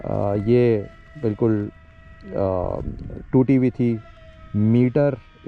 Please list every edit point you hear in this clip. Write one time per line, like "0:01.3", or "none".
none